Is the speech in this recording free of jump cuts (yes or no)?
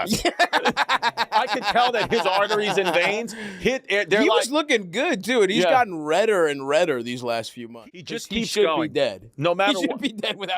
no